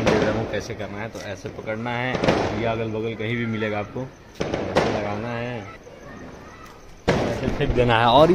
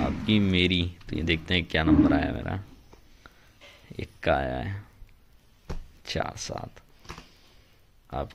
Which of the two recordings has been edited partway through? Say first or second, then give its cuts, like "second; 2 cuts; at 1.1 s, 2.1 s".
first; 1 cut; at 5.7 s